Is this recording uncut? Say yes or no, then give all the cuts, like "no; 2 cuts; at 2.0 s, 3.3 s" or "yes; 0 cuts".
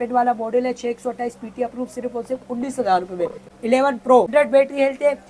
no; 2 cuts; at 3.5 s, 4.3 s